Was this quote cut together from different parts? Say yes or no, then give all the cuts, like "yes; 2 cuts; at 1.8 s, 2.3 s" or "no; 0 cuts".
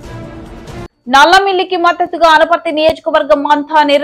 yes; 1 cut; at 1.0 s